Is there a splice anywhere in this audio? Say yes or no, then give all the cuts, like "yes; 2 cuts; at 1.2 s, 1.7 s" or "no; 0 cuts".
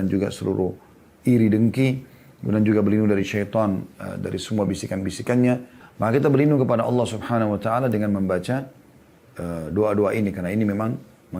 yes; 1 cut; at 5.8 s